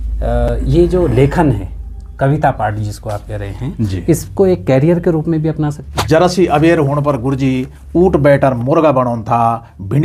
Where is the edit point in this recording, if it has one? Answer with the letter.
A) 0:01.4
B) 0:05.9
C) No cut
B